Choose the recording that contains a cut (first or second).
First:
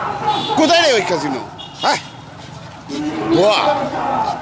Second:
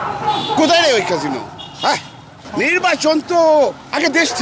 second